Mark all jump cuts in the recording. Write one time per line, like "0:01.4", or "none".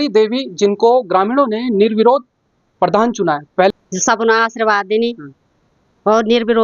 0:03.6